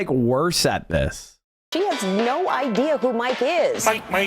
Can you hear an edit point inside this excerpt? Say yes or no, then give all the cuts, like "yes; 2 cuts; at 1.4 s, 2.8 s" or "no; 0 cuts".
yes; 1 cut; at 1.7 s